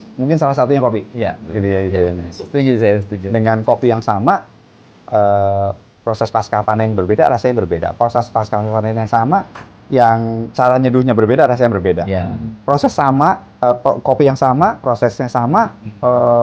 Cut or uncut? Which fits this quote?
uncut